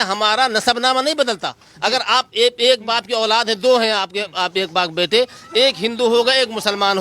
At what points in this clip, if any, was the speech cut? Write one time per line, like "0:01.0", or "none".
none

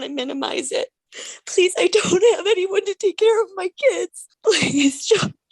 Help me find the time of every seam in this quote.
0:01.1
0:04.2

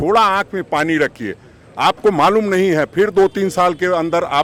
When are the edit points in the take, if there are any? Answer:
none

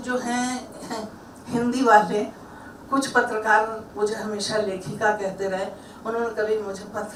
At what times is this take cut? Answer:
none

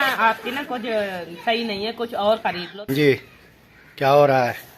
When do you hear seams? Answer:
0:02.4

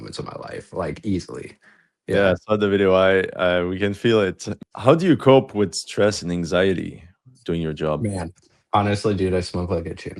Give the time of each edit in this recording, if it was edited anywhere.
none

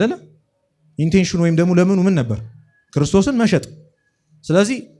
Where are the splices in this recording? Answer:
none

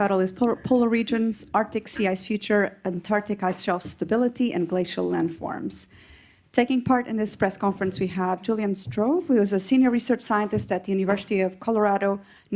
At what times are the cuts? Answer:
none

